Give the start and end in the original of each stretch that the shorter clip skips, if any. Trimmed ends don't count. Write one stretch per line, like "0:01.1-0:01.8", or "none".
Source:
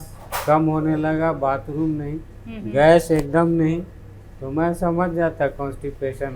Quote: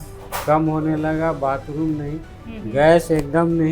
none

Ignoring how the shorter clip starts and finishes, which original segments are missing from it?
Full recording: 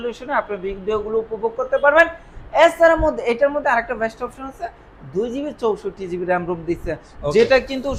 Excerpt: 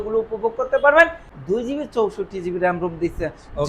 0:02.3-0:04.9

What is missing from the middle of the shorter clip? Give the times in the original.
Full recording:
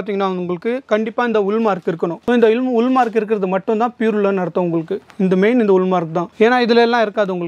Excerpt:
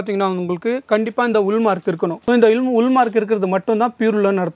none

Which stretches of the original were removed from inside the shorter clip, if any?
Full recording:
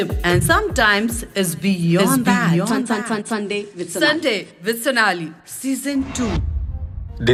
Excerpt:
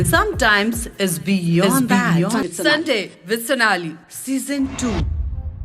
0:02.8-0:03.8

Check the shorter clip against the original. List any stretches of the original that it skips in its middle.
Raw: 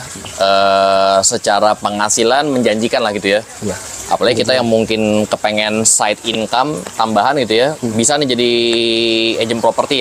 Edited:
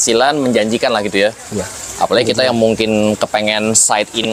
none

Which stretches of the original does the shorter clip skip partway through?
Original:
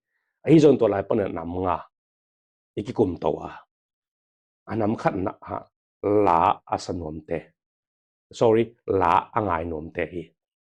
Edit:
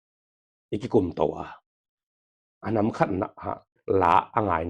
0:05.8-0:08.8

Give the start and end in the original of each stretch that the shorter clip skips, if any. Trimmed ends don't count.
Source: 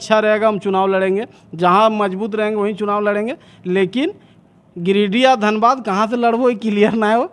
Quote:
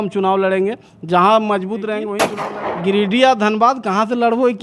0:02.8-0:04.3

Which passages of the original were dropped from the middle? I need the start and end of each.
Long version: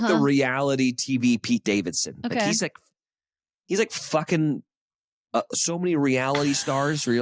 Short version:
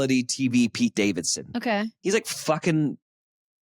0:02.5-0:03.5

